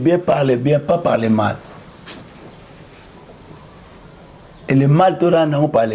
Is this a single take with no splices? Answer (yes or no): yes